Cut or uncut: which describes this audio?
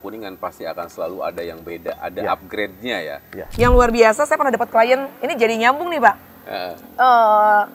cut